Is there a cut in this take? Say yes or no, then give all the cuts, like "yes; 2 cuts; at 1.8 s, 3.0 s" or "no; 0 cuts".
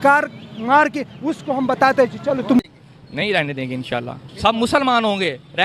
yes; 1 cut; at 2.6 s